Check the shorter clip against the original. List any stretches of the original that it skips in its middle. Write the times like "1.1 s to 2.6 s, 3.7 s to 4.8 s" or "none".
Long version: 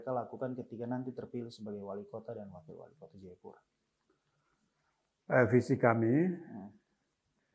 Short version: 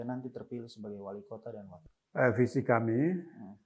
2.6 s to 5.0 s